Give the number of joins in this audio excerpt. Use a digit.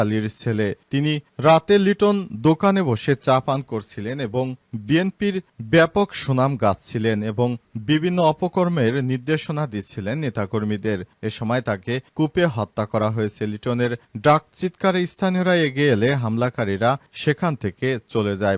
0